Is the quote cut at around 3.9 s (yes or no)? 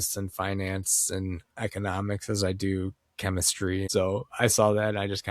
yes